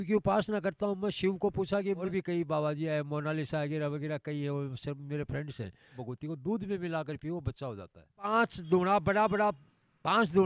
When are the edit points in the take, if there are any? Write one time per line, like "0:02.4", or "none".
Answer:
0:02.0
0:06.0
0:08.3